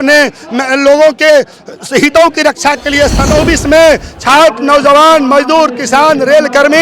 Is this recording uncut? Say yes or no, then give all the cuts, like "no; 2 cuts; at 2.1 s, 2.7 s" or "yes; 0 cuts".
no; 1 cut; at 3.3 s